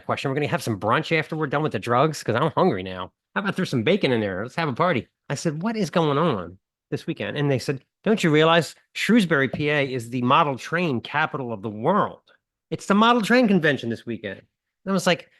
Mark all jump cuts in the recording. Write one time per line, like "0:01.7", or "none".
0:05.2